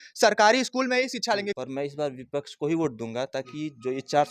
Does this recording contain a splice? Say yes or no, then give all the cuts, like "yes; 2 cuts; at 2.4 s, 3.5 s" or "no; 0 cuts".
yes; 1 cut; at 1.5 s